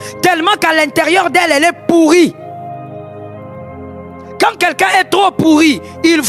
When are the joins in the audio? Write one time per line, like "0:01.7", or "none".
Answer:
none